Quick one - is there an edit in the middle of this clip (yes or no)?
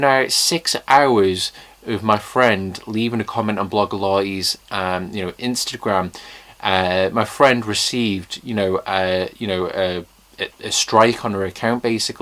no